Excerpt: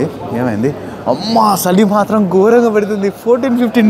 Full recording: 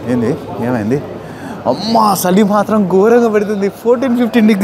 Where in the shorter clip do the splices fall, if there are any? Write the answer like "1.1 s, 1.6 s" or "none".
1.2 s